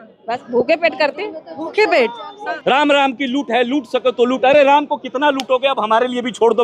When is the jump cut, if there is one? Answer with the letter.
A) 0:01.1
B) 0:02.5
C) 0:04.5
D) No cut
B